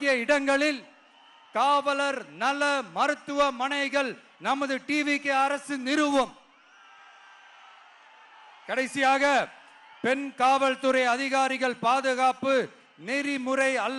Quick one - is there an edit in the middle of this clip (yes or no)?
no